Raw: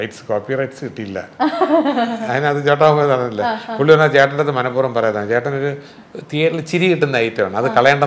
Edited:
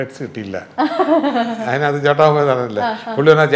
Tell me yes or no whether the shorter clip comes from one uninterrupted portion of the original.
yes